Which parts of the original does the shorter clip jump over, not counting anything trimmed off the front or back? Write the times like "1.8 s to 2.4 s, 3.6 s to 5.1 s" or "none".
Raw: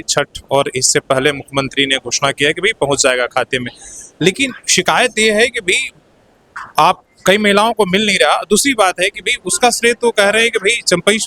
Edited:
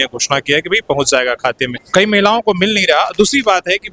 3.7 s to 7.1 s